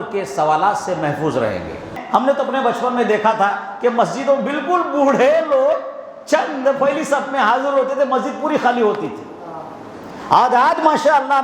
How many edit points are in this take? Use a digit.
1